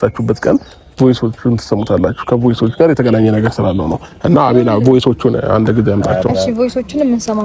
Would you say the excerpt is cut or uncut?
uncut